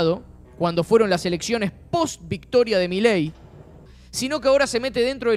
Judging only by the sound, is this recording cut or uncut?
cut